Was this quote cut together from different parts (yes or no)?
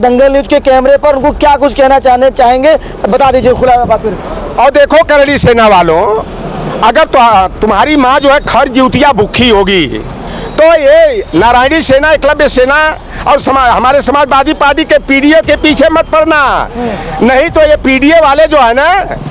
no